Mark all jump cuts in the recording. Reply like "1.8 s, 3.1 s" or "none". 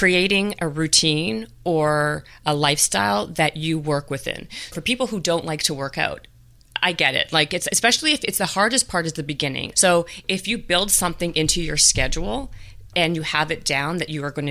4.8 s, 9.6 s